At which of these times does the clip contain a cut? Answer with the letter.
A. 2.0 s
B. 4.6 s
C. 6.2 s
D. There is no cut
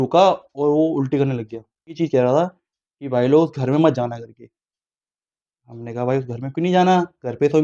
A